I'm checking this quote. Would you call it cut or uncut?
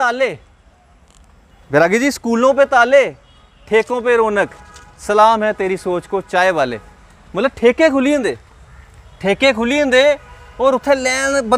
uncut